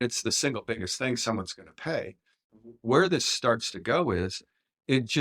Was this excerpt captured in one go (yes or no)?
no